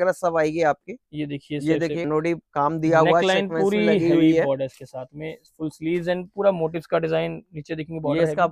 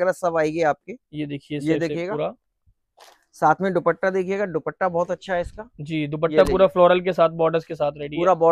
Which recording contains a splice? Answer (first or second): first